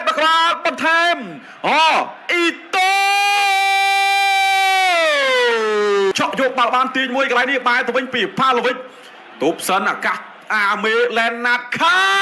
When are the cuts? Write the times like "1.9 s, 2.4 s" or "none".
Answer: 6.1 s